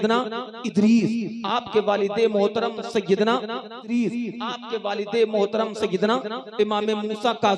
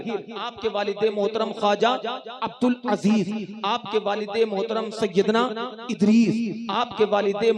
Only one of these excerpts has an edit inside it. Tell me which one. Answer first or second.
first